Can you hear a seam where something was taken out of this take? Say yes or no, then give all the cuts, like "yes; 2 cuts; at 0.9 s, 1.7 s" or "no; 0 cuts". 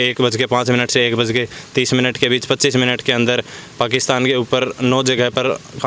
no; 0 cuts